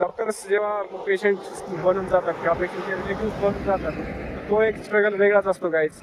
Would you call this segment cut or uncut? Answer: uncut